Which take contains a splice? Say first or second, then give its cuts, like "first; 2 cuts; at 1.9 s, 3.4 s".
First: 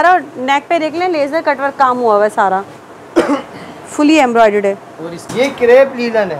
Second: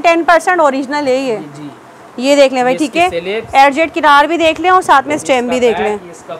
first; 1 cut; at 5.3 s